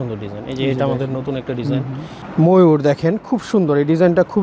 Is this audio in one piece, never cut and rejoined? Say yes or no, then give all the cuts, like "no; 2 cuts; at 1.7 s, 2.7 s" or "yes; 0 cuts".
yes; 0 cuts